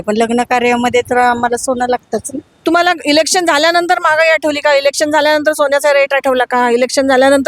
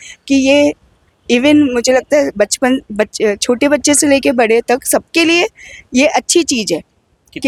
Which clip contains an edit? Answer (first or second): first